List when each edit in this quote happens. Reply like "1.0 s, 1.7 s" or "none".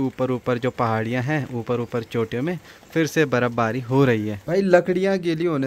4.4 s